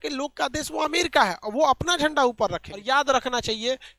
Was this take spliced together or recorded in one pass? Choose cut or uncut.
cut